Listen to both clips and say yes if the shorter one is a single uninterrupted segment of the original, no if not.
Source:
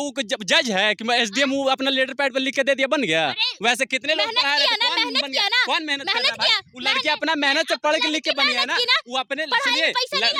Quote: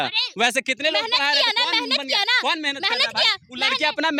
yes